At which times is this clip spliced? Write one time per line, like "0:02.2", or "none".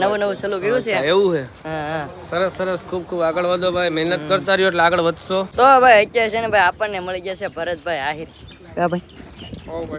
0:05.5